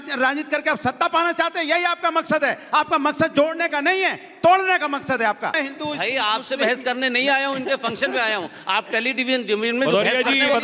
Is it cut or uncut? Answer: cut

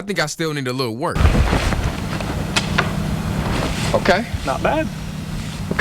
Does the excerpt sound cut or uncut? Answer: cut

